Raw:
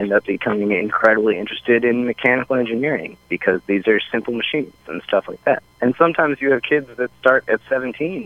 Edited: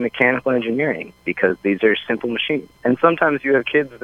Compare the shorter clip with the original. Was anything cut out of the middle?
yes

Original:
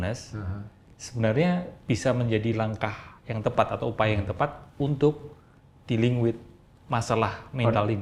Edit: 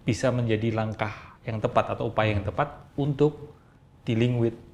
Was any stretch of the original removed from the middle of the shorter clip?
no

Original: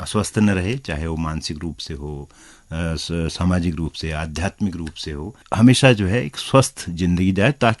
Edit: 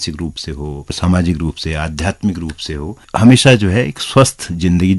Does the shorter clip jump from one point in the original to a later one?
yes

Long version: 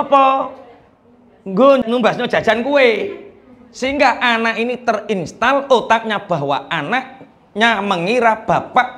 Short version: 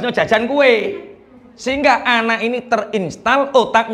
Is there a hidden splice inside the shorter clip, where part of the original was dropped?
no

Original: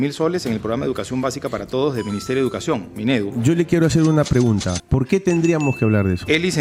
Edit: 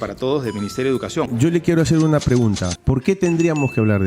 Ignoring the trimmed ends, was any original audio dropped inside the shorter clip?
yes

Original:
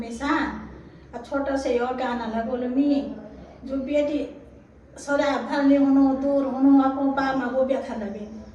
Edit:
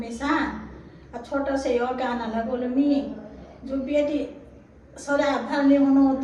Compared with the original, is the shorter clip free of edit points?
yes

